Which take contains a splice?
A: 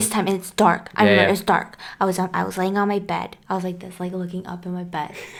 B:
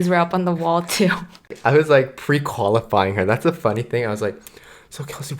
B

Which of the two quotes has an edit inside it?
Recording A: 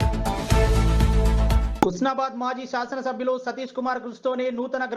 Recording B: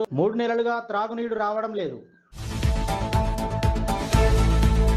A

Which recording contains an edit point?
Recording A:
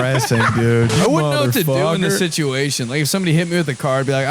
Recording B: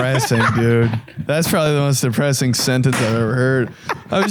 A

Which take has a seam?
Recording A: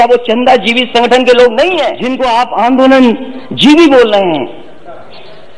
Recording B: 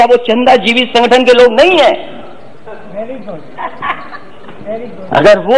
A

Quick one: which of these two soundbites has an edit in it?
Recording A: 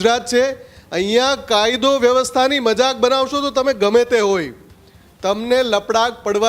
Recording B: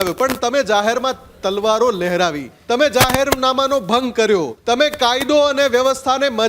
B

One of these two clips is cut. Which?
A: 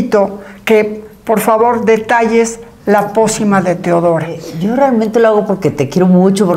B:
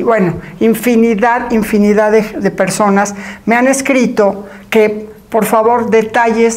A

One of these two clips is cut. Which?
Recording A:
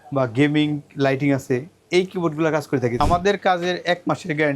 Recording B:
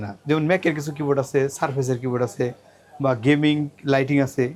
A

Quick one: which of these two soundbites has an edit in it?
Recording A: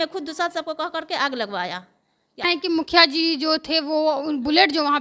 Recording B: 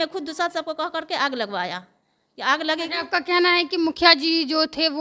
A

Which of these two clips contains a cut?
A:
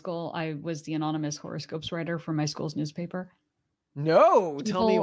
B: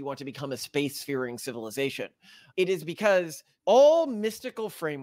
B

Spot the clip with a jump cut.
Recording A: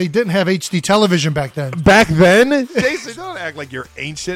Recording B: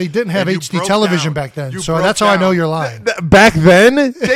A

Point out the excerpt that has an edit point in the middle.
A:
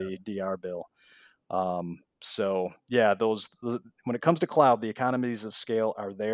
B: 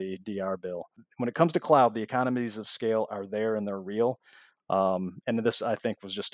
B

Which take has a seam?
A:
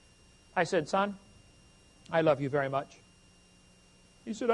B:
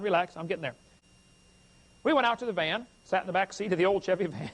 B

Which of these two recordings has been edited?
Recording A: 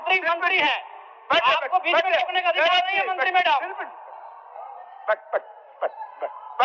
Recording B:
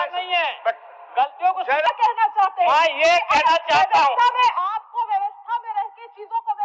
B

